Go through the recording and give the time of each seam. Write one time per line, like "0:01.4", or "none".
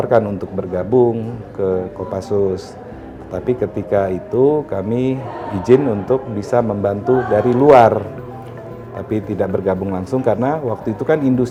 none